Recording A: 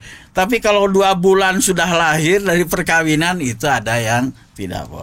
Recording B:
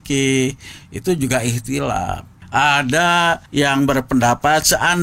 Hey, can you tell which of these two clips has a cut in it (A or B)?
B